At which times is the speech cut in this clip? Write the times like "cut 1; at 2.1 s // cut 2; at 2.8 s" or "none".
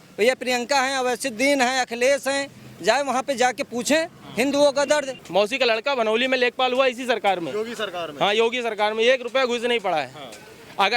cut 1; at 5.1 s